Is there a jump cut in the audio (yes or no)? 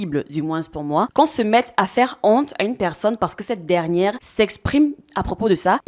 no